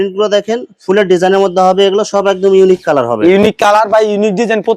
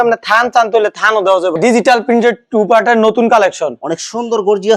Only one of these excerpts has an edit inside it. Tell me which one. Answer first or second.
second